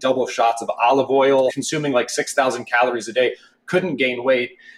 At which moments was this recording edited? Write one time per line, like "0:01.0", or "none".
0:01.6